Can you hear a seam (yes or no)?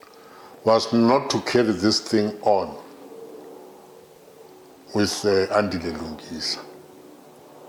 no